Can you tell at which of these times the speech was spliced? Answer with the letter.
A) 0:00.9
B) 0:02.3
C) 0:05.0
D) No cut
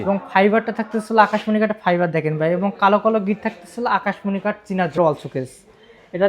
C